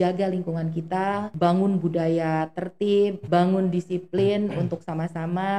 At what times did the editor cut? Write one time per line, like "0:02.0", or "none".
0:01.3
0:03.2